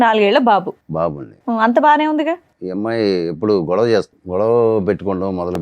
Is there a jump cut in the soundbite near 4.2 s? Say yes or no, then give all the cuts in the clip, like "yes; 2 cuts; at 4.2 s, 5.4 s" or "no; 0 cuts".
yes; 2 cuts; at 2.5 s, 4.2 s